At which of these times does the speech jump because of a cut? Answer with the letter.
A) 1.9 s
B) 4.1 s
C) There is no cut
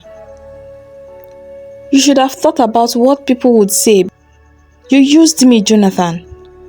B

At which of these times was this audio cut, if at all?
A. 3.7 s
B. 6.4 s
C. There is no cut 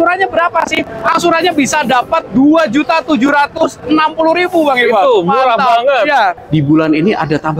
B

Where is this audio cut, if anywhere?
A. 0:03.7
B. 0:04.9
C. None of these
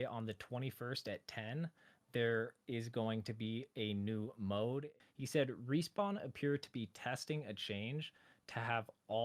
B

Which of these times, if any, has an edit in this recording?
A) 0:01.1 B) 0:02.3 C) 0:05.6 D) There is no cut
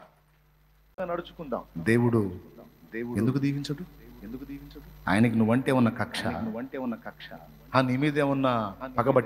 A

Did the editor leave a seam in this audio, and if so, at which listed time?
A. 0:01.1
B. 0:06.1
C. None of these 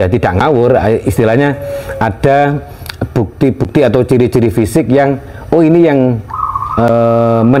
C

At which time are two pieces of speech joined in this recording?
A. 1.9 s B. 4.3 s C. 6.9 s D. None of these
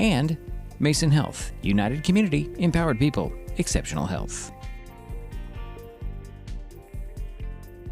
B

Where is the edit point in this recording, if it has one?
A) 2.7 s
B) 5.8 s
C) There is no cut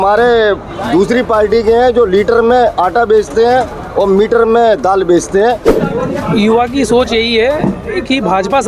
B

